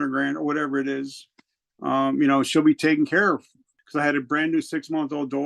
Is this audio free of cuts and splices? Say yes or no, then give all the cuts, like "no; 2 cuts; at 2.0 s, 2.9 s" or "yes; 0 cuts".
no; 1 cut; at 3.8 s